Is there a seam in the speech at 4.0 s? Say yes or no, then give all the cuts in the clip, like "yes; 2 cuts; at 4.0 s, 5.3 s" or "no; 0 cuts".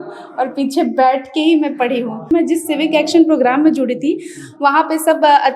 no; 1 cut; at 2.2 s